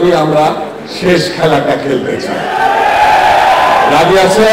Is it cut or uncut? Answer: uncut